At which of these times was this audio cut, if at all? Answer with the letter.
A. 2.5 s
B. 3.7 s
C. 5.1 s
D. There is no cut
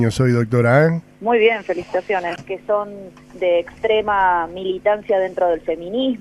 D